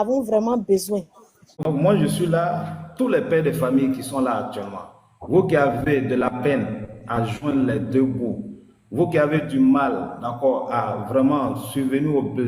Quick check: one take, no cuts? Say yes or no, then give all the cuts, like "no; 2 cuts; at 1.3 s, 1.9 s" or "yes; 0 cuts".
no; 1 cut; at 1.1 s